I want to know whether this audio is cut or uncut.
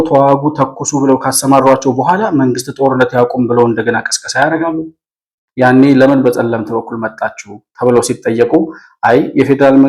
cut